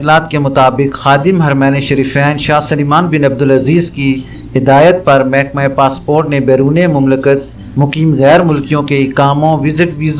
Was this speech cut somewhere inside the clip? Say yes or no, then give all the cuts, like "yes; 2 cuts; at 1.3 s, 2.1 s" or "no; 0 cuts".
no; 0 cuts